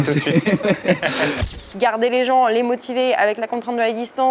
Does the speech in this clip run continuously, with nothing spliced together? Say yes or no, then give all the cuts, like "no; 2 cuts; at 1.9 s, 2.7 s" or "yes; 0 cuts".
no; 1 cut; at 1.5 s